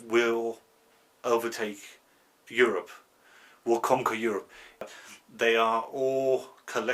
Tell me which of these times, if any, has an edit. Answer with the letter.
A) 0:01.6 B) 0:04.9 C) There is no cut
B